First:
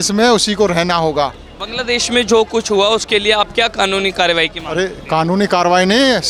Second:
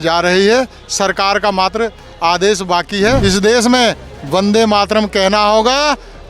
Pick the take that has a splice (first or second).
second